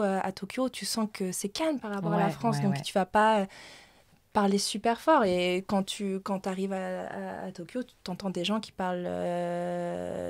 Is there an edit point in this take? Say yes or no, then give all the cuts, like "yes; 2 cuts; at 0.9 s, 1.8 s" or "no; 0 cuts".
no; 0 cuts